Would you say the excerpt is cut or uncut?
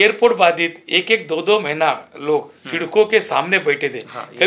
uncut